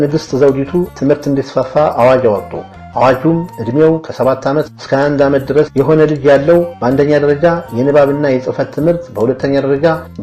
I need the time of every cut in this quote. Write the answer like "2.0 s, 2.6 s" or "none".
0.9 s